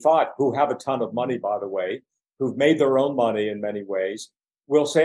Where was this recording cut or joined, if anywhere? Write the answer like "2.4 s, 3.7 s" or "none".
none